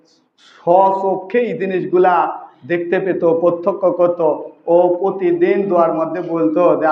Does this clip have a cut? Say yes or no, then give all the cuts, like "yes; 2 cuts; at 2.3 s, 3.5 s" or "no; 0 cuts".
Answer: no; 0 cuts